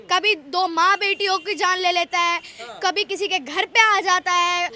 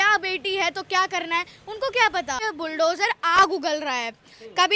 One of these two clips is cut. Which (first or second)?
second